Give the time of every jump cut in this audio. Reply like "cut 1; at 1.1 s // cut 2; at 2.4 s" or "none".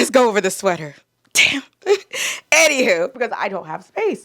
cut 1; at 3.1 s